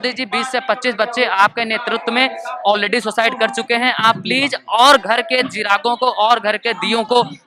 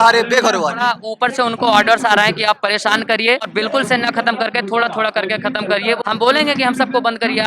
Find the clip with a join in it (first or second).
second